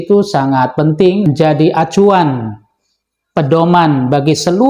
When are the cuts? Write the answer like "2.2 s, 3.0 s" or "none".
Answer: 1.3 s